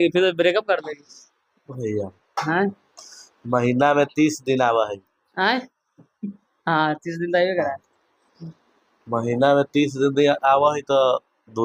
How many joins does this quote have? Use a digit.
0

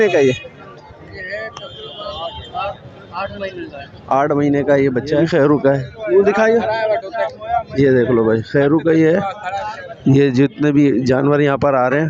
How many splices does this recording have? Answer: 1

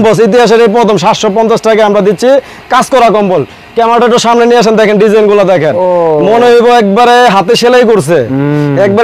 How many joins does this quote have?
0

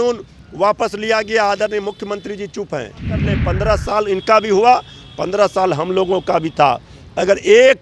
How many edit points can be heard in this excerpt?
1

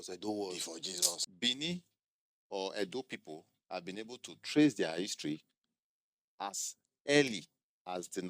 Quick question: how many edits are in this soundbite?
1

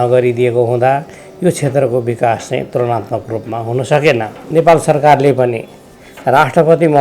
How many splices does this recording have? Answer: 1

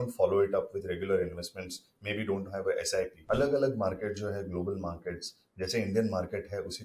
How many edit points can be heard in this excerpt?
1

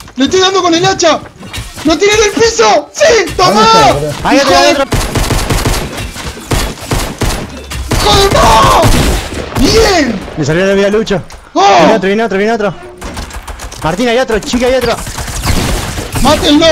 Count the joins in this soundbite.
2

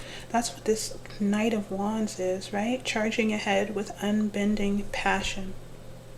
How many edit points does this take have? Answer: 0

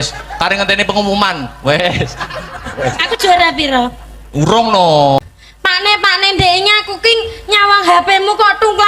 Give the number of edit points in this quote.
1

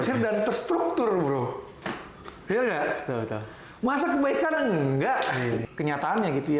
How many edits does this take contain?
1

